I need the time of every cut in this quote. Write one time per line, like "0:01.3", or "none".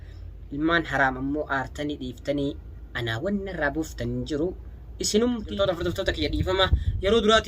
0:05.5